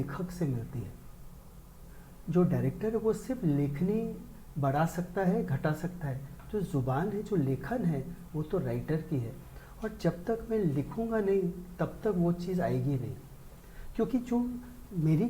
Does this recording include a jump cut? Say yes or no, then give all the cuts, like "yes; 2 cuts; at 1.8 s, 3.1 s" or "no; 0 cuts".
no; 0 cuts